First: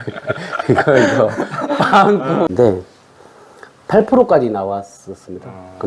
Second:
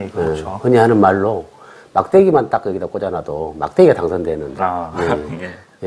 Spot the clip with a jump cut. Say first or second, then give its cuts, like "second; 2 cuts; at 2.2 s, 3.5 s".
first; 1 cut; at 2.5 s